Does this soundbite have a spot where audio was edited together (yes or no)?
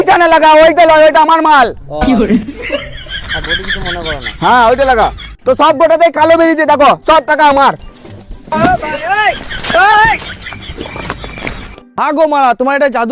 no